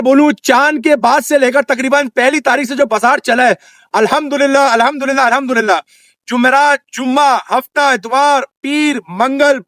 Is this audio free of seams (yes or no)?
yes